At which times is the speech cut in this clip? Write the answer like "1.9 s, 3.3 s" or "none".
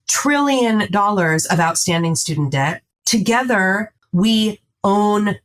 2.9 s, 4.0 s